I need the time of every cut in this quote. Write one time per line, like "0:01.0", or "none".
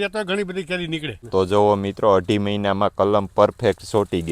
0:01.1